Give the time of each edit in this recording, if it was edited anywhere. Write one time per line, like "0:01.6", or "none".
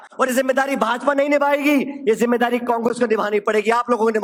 none

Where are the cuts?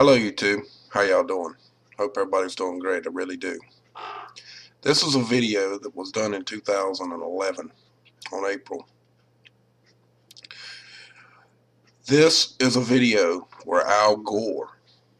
none

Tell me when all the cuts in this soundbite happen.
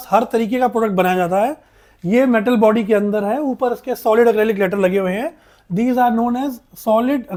none

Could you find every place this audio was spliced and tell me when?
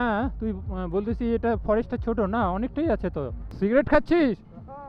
0:03.4

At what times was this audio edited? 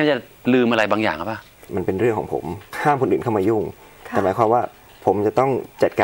0:01.7
0:02.7

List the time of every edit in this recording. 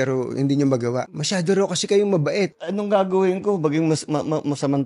0:01.1
0:02.6

